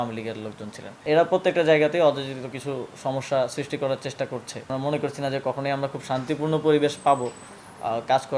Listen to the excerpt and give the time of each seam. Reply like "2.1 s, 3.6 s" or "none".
1.0 s, 4.7 s